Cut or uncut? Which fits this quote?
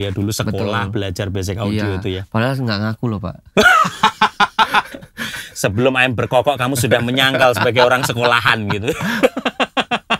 uncut